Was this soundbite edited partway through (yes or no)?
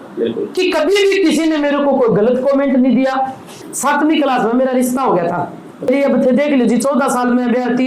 yes